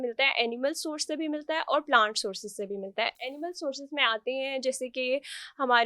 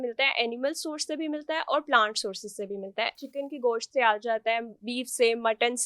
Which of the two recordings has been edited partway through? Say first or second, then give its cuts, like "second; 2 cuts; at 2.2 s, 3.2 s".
second; 1 cut; at 3.2 s